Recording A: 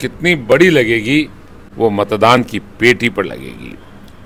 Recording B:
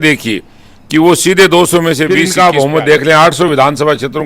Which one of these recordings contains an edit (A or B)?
B